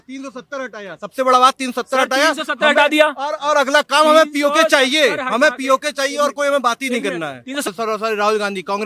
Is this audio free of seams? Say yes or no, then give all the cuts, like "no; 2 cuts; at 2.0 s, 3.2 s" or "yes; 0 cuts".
no; 1 cut; at 7.7 s